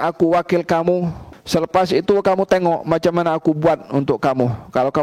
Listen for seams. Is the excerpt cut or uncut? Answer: cut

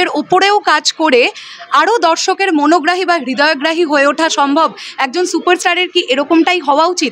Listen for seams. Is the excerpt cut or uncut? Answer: uncut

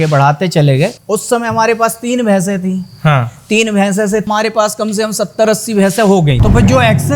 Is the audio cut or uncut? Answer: cut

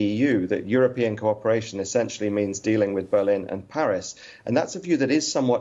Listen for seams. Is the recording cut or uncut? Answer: uncut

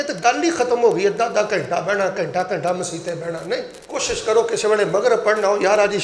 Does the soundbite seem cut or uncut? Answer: cut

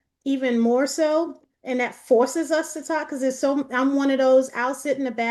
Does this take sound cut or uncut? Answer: uncut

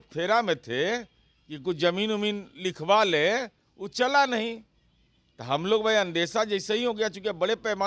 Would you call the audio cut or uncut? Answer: uncut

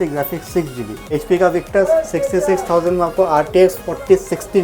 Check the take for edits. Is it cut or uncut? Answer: cut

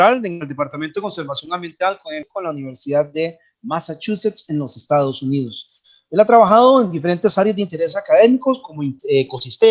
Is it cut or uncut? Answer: cut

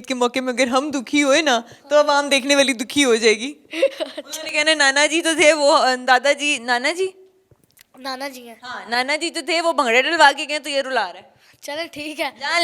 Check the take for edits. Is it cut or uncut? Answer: uncut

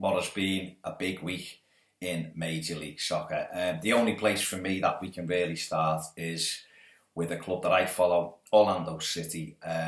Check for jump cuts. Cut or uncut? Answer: uncut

